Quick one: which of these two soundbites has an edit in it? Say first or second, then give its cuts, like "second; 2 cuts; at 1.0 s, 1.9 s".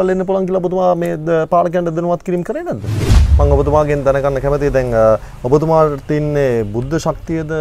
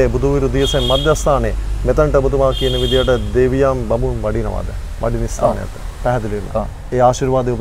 first; 1 cut; at 3.2 s